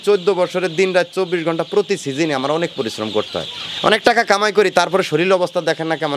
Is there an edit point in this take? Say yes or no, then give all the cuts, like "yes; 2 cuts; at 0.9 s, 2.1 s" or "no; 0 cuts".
no; 0 cuts